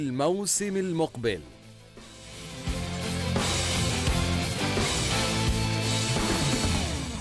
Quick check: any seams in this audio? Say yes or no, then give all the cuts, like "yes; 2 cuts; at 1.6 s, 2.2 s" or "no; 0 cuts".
no; 0 cuts